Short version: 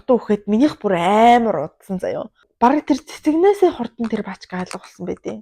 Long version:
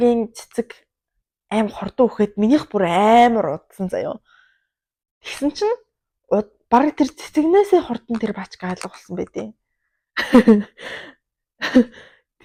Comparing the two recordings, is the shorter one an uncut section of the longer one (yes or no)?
no